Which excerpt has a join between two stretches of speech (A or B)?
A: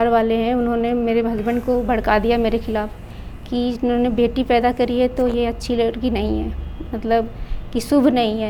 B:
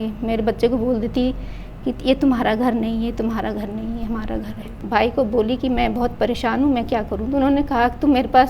B